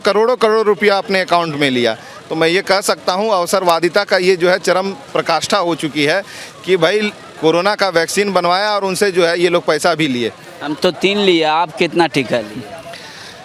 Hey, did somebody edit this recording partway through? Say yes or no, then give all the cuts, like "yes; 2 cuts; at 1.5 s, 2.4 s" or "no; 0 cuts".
no; 0 cuts